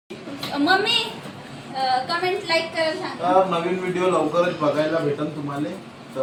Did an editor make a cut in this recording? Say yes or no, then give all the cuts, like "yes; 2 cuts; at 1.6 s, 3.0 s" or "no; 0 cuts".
no; 0 cuts